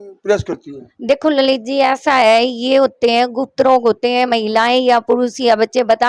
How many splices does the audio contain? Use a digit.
0